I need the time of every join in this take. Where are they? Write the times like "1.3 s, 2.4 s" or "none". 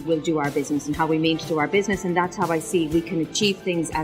none